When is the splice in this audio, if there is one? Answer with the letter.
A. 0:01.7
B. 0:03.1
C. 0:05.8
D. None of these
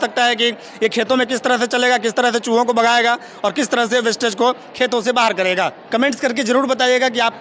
D